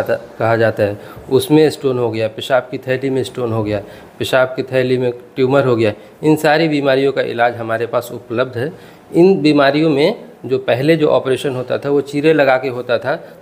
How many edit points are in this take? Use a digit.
0